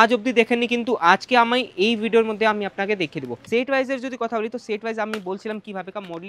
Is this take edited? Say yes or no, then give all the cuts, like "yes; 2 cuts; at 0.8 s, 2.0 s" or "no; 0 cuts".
yes; 1 cut; at 3.3 s